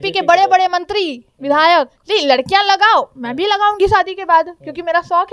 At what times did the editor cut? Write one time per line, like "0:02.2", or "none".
0:02.0